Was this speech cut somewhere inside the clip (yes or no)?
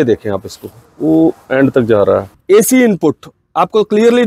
yes